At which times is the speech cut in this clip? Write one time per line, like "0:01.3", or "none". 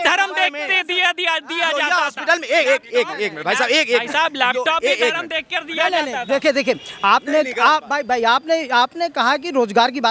none